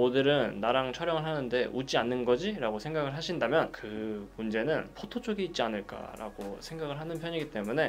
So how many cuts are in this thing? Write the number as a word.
one